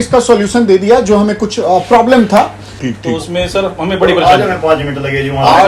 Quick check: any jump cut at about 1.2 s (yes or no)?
no